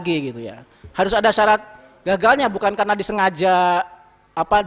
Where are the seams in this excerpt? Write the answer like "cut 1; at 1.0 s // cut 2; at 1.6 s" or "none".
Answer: none